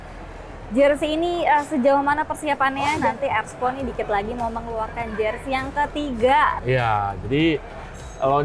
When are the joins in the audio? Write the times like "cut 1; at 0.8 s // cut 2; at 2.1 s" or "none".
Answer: cut 1; at 3.0 s // cut 2; at 6.6 s